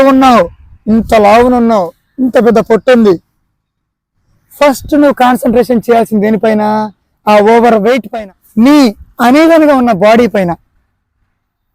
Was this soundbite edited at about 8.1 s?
yes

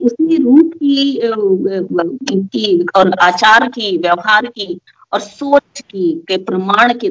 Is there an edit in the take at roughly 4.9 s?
no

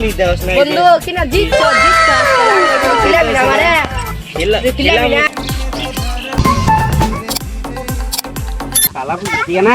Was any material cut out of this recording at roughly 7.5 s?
no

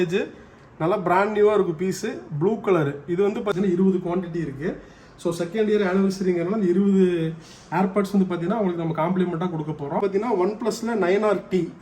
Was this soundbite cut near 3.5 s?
yes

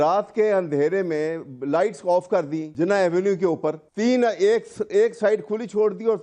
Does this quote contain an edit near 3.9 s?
yes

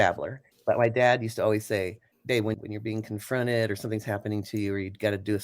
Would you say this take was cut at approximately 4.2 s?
no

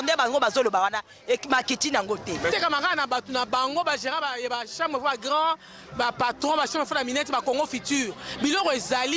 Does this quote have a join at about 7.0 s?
no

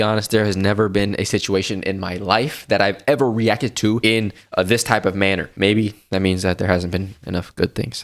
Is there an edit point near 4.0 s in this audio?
yes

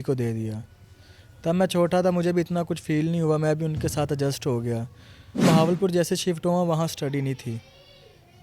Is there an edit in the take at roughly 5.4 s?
yes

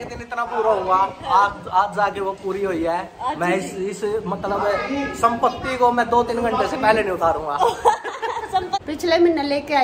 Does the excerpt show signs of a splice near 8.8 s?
yes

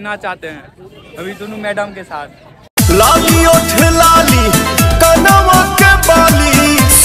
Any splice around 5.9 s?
no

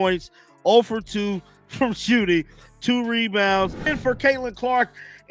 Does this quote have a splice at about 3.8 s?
yes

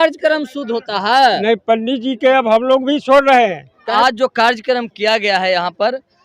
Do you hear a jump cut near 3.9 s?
yes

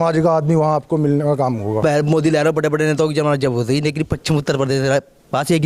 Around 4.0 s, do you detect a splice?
no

